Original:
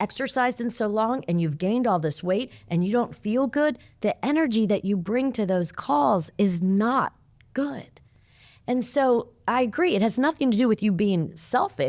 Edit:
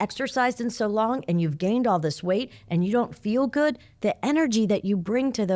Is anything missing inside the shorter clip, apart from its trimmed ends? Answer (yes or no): no